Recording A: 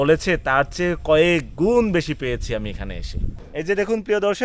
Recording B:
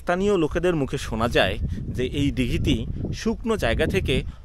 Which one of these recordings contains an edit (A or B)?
A